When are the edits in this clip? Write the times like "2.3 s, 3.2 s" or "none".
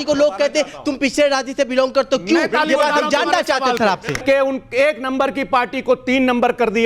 4.2 s